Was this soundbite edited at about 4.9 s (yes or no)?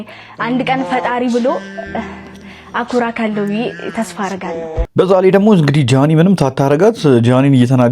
yes